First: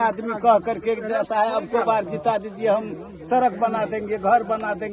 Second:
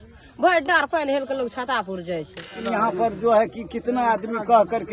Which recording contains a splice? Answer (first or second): second